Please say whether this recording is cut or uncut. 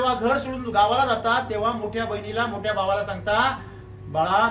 uncut